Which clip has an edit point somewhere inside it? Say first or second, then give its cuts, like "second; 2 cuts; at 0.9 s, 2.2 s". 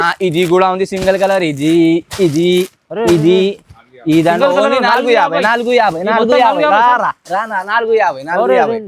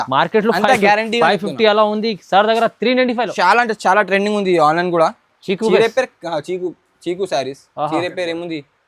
second; 1 cut; at 3.3 s